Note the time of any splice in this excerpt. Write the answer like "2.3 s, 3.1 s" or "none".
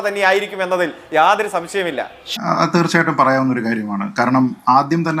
2.2 s

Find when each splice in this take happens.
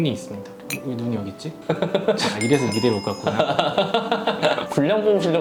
none

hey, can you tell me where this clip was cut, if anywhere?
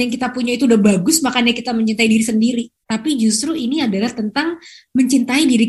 none

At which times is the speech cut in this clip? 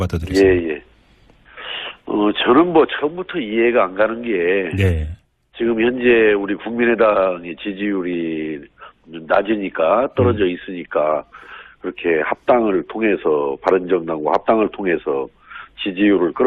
8.2 s

